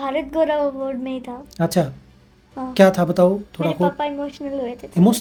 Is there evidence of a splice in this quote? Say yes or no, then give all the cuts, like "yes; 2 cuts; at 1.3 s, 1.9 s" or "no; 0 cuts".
no; 0 cuts